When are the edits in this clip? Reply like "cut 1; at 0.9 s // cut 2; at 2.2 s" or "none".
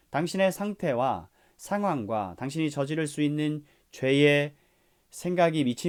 none

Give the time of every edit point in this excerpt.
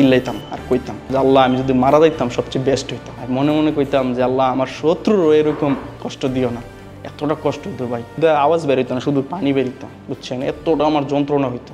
cut 1; at 1.0 s // cut 2; at 8.2 s

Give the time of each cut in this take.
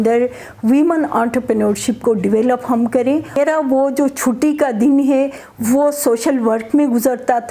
cut 1; at 3.4 s

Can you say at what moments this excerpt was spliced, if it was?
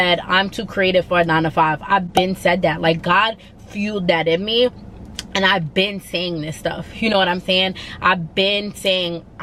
none

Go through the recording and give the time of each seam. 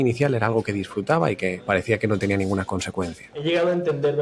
cut 1; at 1.6 s // cut 2; at 3.4 s

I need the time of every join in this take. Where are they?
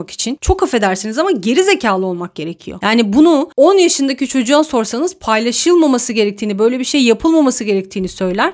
none

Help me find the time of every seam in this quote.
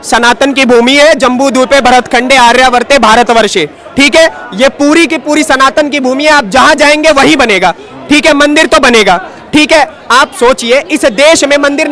none

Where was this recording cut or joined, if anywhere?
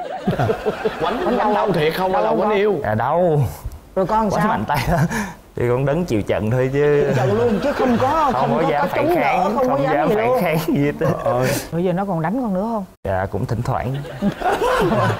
none

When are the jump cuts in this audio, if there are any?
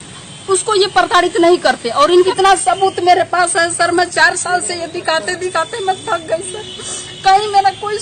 cut 1; at 1.9 s

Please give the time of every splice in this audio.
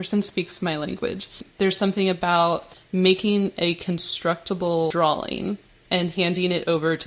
cut 1; at 1.4 s // cut 2; at 2.7 s // cut 3; at 4.9 s // cut 4; at 5.7 s

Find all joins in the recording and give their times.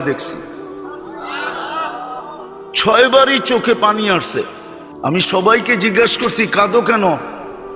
cut 1; at 5.1 s

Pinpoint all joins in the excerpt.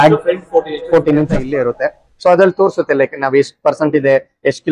cut 1; at 1.4 s

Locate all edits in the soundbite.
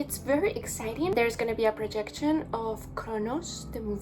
cut 1; at 1.1 s

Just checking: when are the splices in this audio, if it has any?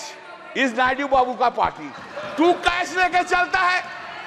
none

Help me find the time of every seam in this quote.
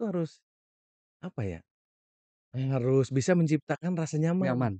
none

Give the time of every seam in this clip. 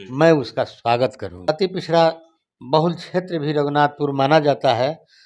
cut 1; at 1.5 s

